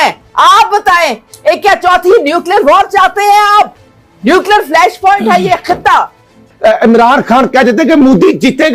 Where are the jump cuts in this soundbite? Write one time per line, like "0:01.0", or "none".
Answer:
0:06.4